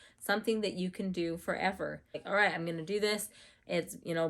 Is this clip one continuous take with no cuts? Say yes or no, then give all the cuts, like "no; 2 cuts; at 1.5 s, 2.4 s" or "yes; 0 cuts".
no; 1 cut; at 2.2 s